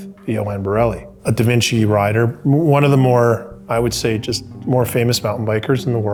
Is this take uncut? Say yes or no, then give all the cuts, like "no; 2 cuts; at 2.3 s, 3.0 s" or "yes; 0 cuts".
yes; 0 cuts